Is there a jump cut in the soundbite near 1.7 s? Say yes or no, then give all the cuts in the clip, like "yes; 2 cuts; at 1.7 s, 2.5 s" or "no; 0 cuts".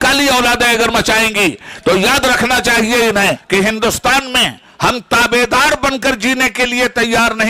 no; 1 cut; at 3.4 s